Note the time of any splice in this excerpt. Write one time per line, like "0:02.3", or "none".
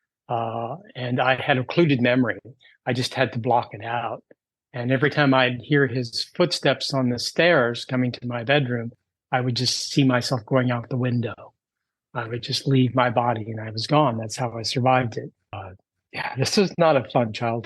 0:15.6